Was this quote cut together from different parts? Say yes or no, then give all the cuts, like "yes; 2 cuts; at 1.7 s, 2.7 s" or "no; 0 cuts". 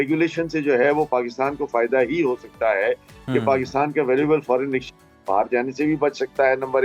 no; 0 cuts